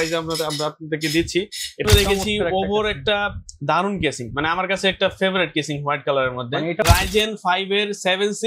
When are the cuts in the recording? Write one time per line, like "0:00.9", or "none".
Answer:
0:01.8
0:06.8